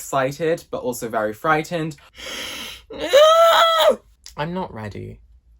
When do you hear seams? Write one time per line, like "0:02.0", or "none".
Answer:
0:02.0